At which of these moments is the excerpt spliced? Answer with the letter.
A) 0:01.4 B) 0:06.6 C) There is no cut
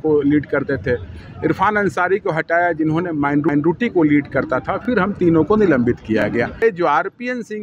B